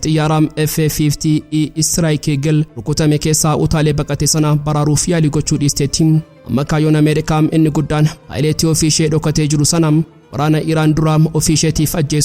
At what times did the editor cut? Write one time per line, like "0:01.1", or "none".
0:06.3
0:08.1